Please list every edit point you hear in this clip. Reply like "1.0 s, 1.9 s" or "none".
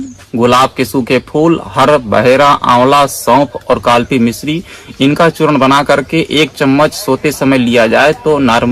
none